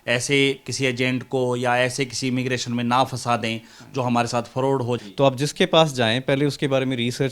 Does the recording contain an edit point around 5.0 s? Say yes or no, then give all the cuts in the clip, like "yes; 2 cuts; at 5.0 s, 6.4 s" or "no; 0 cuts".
yes; 1 cut; at 5.0 s